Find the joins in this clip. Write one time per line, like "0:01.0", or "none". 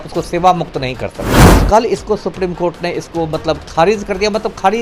0:01.6